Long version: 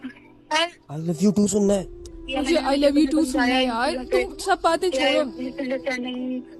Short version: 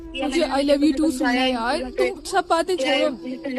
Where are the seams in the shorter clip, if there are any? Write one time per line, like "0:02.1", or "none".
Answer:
none